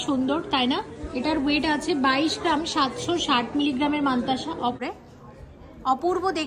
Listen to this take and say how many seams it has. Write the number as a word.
one